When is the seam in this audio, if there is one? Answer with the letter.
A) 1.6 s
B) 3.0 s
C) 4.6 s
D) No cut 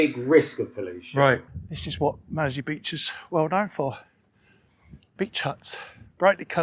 A